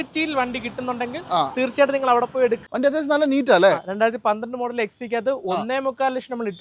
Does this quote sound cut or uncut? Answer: cut